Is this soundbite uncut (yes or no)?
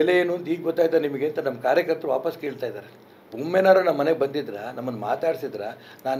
yes